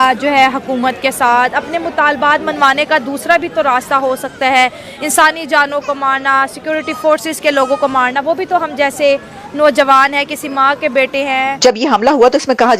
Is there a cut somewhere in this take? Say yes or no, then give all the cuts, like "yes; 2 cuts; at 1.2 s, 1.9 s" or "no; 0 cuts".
yes; 1 cut; at 11.6 s